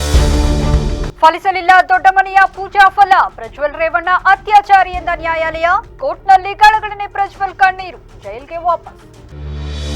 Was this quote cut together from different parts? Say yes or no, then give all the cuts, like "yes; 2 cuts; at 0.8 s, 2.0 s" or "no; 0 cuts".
yes; 1 cut; at 1.1 s